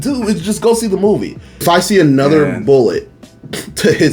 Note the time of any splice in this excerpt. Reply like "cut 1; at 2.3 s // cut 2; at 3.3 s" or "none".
cut 1; at 1.6 s